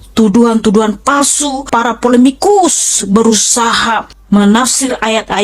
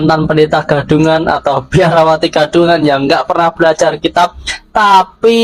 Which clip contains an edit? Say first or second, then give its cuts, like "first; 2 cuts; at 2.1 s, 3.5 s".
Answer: first; 2 cuts; at 1.7 s, 4.1 s